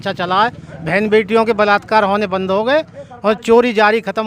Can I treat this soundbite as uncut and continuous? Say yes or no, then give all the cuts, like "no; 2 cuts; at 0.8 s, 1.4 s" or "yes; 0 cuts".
yes; 0 cuts